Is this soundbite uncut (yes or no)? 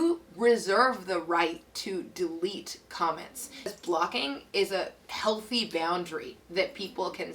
no